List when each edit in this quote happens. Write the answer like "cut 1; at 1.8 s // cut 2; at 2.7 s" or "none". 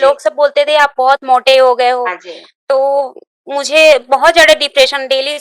none